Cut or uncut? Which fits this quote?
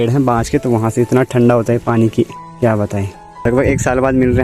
cut